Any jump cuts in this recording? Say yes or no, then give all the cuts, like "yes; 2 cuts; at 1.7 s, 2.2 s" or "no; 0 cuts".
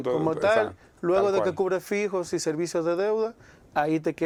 no; 0 cuts